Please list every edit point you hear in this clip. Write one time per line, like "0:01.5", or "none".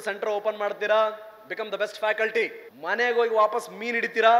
0:02.7